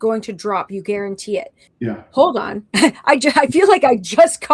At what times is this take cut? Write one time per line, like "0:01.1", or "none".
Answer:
0:01.6

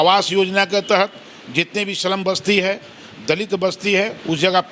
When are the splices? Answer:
none

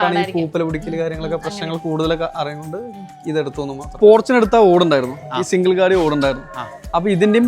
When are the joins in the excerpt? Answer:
0:04.0

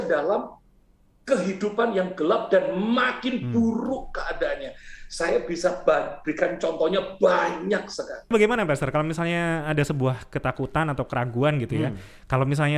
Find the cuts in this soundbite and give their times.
0:08.3

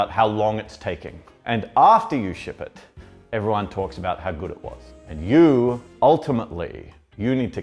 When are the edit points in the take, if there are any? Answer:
0:04.9

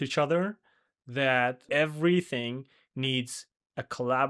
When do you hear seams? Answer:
0:01.6

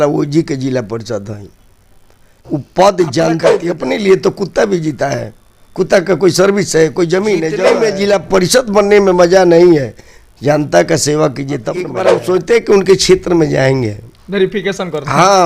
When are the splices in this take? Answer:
0:02.4
0:03.5
0:07.7
0:12.2

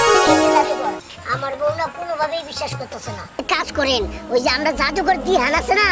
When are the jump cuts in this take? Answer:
0:03.4

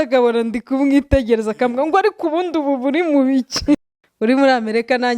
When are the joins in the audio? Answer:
0:03.8

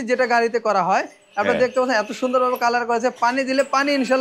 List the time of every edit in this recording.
none

